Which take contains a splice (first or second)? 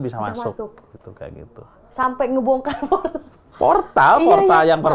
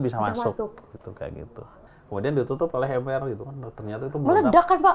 second